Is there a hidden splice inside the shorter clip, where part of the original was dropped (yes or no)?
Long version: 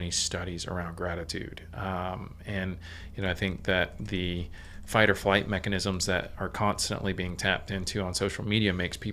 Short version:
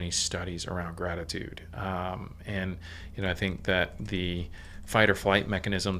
no